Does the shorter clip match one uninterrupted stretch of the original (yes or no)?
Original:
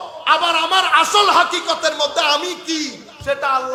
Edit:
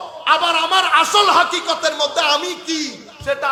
yes